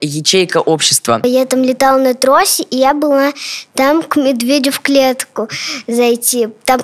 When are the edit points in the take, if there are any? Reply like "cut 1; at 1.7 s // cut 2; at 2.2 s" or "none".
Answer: cut 1; at 1.2 s